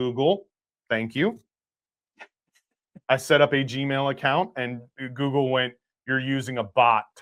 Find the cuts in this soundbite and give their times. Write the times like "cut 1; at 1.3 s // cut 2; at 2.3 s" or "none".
none